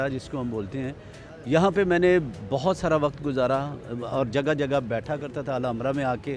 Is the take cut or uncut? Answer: uncut